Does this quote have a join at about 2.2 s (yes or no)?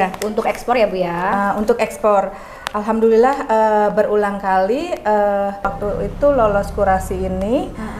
no